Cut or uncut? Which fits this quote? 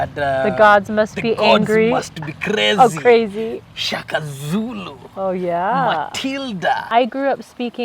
cut